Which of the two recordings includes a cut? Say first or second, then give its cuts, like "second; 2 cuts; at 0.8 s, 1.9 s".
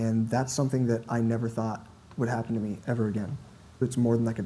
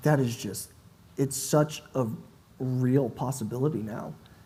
first; 1 cut; at 3.6 s